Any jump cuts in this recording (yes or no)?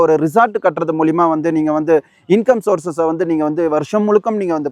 no